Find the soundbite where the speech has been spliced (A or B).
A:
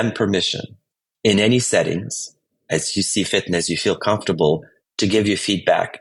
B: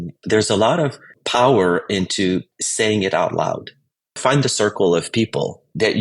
B